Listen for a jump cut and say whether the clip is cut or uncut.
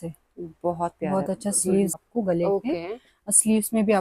cut